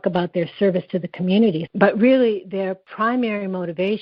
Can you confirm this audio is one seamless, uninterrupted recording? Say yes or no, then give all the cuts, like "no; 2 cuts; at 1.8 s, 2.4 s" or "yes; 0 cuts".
no; 2 cuts; at 1.6 s, 2.8 s